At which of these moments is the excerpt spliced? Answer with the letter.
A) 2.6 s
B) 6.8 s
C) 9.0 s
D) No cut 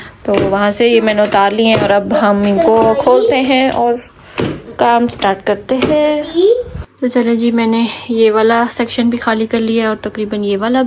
B